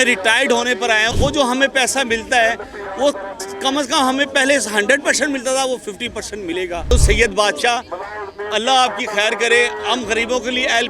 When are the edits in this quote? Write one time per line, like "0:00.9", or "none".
0:01.1
0:06.9